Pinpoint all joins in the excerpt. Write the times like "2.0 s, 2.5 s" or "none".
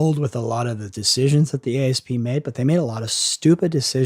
none